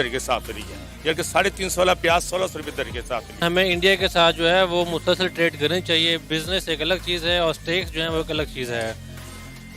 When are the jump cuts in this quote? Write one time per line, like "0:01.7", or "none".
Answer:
0:03.4